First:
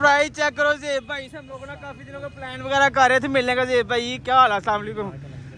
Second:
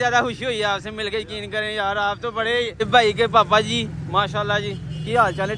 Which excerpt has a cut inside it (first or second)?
second